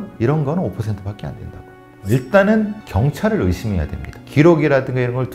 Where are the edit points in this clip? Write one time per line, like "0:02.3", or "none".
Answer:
0:04.2